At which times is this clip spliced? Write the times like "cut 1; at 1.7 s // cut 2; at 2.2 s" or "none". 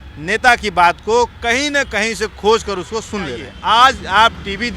cut 1; at 3.5 s